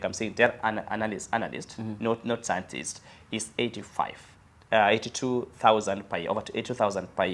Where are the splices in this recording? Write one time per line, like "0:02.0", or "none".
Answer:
none